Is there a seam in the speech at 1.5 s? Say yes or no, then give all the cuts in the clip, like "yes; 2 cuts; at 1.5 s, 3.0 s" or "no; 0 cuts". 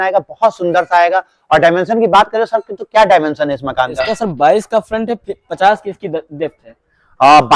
no; 0 cuts